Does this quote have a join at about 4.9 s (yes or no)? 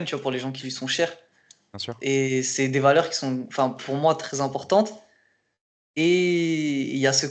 no